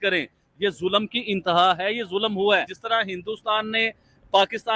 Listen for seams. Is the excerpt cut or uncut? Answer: cut